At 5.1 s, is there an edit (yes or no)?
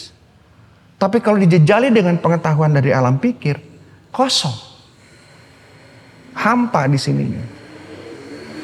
no